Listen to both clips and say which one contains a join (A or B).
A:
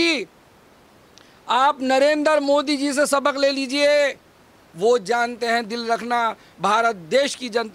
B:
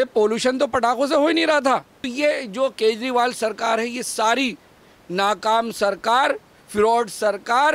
B